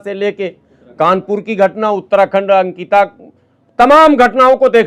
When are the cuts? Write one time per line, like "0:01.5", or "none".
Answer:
none